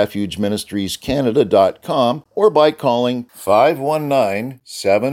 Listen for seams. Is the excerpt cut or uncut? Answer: cut